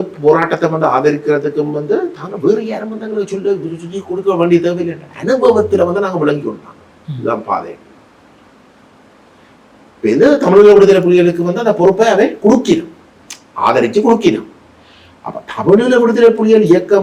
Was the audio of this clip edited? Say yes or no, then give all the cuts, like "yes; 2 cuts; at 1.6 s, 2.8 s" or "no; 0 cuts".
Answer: no; 0 cuts